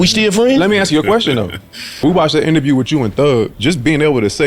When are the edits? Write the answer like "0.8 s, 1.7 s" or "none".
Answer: 2.0 s, 3.5 s